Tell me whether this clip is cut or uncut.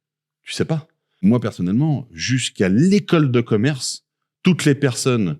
cut